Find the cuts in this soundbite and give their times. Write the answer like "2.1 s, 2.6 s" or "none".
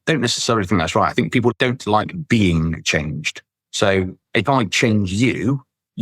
1.5 s